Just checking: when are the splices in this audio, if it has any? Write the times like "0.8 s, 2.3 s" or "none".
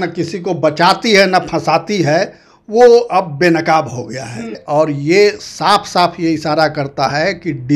4.6 s